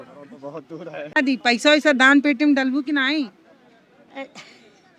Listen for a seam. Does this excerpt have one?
yes; 1 cut; at 1.2 s

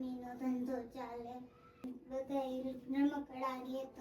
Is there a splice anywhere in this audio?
yes; 1 cut; at 1.8 s

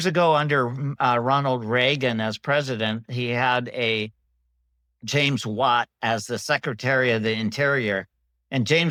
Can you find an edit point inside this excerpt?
no; 0 cuts

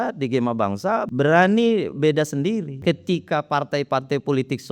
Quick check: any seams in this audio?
yes; 2 cuts; at 1.0 s, 2.7 s

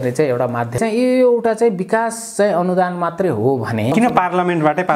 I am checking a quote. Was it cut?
yes; 2 cuts; at 0.8 s, 3.9 s

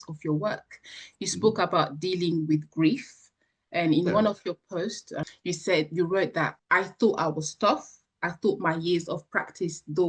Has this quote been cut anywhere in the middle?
yes; 2 cuts; at 5.1 s, 6.6 s

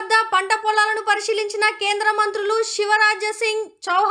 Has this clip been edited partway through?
no; 0 cuts

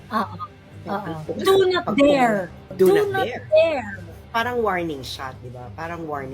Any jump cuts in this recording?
yes; 3 cuts; at 1.2 s, 2.6 s, 4.2 s

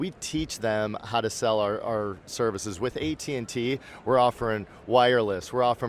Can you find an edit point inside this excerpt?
no; 0 cuts

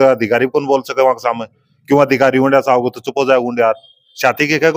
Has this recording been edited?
no; 0 cuts

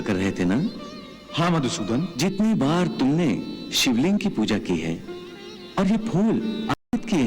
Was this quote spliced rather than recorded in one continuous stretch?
yes; 1 cut; at 2.1 s

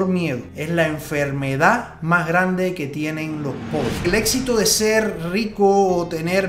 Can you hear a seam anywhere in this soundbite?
yes; 1 cut; at 4.0 s

